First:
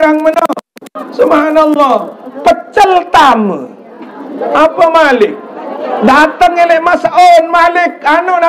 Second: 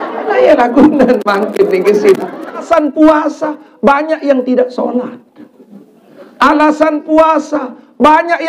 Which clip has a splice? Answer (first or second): second